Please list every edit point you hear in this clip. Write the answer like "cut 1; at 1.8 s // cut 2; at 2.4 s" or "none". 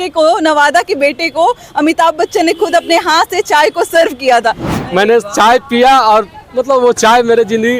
cut 1; at 4.7 s